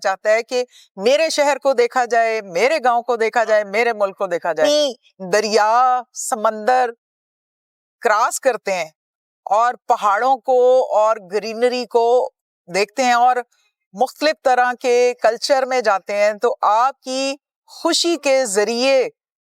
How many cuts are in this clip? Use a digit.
1